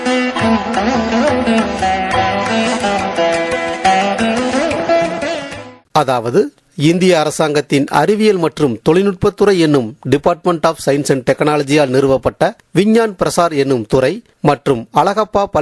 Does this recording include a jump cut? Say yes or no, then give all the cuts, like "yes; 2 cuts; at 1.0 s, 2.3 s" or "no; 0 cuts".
yes; 1 cut; at 5.7 s